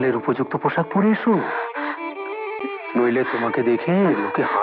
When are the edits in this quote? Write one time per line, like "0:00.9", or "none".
none